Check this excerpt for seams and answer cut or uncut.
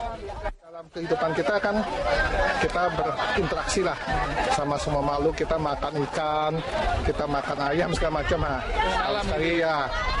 uncut